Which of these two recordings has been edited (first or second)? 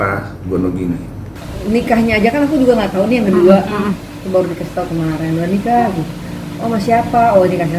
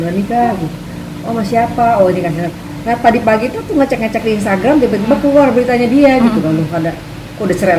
first